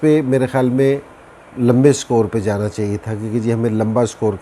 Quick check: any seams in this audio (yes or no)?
no